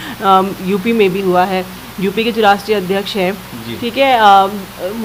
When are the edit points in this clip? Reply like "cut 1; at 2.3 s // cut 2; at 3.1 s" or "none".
none

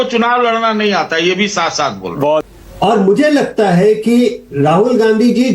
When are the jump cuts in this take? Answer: cut 1; at 2.5 s

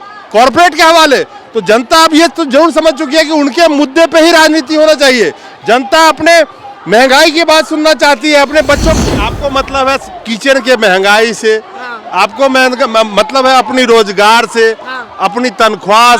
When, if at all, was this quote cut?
cut 1; at 9.0 s

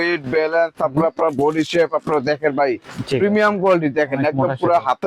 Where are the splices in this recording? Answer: none

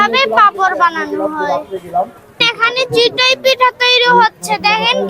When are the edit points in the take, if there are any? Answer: cut 1; at 2.4 s

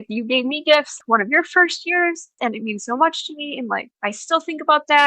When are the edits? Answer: cut 1; at 1.0 s // cut 2; at 2.3 s // cut 3; at 3.9 s

